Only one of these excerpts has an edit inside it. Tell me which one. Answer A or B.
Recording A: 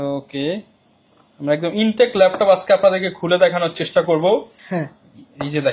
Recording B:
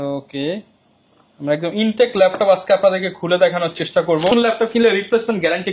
B